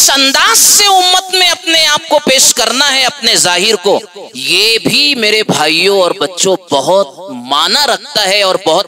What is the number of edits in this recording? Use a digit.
0